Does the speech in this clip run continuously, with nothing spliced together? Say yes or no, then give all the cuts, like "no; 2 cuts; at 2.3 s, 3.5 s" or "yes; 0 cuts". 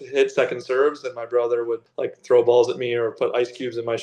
no; 1 cut; at 1.9 s